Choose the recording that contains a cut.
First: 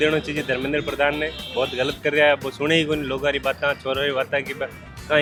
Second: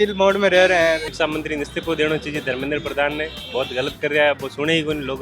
second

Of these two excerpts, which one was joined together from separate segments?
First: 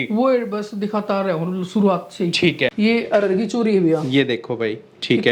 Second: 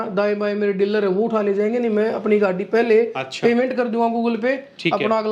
first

